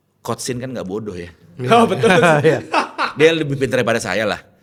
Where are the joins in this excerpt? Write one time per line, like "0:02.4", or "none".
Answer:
none